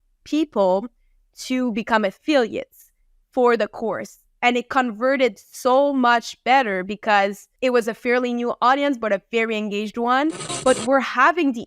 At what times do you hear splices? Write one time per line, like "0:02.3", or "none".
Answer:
0:07.4
0:10.5